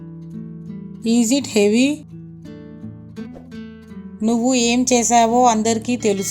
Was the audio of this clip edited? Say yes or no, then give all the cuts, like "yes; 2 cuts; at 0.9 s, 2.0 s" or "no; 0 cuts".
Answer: yes; 3 cuts; at 1.0 s, 2.0 s, 3.5 s